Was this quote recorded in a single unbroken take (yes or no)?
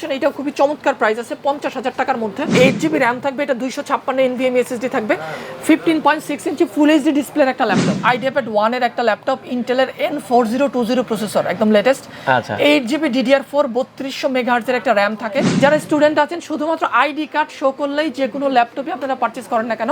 no